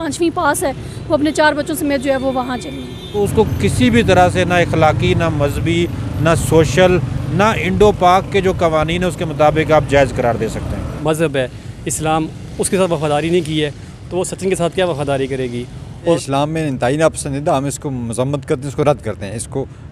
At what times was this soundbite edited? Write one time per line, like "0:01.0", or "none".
0:03.0
0:10.9
0:16.1